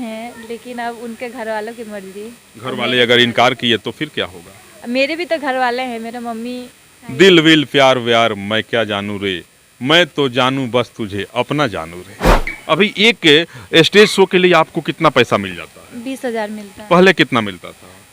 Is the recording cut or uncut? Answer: cut